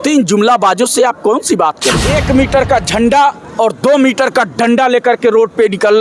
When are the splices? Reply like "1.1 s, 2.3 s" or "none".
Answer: 2.1 s